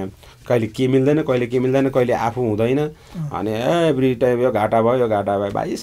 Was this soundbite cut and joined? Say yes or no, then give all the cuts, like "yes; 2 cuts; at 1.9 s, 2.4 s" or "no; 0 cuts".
no; 0 cuts